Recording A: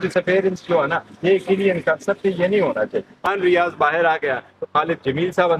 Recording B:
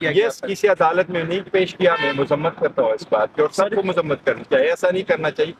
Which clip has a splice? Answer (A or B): A